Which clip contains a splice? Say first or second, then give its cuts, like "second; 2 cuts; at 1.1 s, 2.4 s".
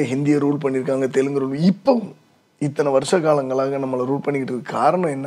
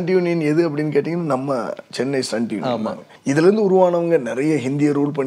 second; 1 cut; at 3.1 s